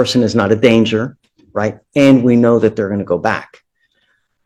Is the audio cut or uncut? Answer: uncut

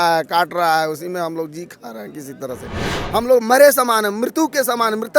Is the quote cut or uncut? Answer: cut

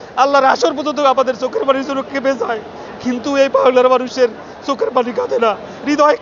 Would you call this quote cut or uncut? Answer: uncut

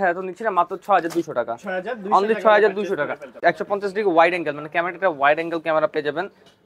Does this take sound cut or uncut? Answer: cut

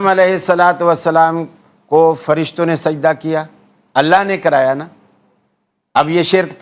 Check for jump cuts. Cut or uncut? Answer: uncut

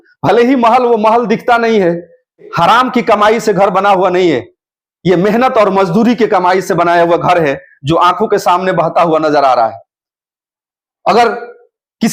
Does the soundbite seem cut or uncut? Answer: cut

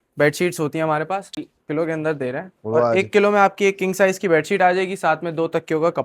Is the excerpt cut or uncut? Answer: cut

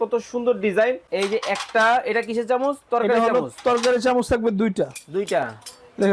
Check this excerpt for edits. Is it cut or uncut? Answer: cut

